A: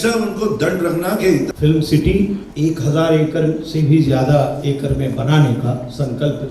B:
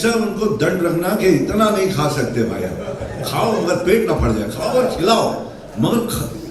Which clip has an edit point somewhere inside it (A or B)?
A